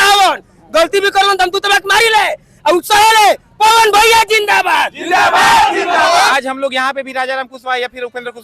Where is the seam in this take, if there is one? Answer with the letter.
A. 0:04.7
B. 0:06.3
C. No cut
B